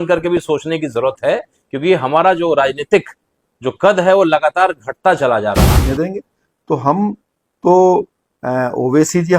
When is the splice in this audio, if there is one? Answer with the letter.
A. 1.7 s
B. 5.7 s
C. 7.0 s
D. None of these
B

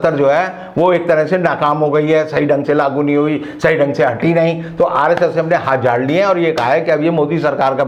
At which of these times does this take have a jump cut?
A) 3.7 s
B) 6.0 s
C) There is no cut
C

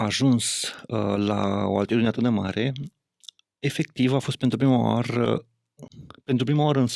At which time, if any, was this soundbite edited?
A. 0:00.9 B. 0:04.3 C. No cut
C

